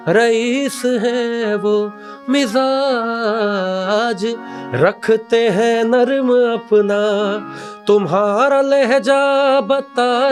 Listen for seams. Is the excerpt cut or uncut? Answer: uncut